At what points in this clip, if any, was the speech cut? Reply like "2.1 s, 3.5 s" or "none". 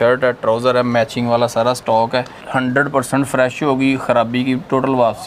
2.4 s